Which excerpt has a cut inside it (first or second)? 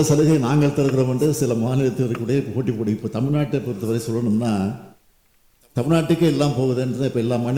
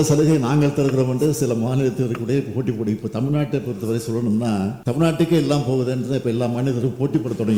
second